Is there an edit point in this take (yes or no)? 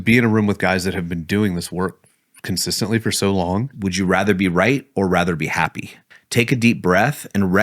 yes